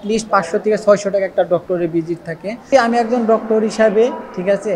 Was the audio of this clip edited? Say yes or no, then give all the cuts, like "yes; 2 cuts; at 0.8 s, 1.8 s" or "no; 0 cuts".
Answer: yes; 1 cut; at 2.6 s